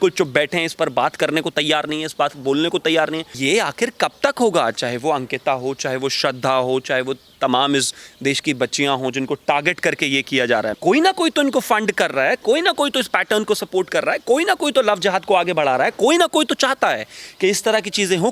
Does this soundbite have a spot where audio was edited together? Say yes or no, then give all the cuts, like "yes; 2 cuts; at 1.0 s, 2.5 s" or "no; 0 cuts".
yes; 2 cuts; at 3.3 s, 10.7 s